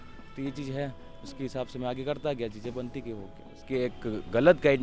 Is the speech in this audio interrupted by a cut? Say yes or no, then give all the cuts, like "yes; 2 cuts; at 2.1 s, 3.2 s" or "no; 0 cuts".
yes; 1 cut; at 3.6 s